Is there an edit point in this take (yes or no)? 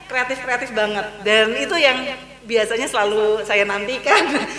no